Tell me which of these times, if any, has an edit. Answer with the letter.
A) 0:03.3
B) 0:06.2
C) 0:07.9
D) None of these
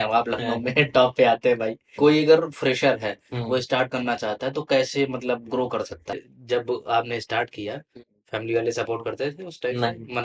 B